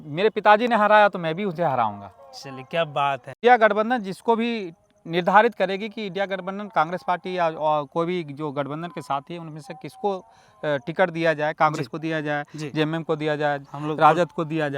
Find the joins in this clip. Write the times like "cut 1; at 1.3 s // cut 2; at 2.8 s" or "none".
cut 1; at 3.4 s